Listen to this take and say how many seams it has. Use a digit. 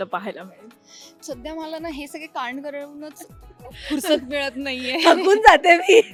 0